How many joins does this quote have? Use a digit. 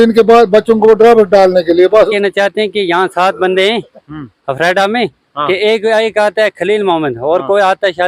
1